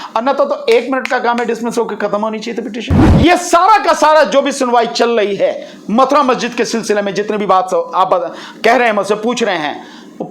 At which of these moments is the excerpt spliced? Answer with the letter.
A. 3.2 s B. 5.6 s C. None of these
A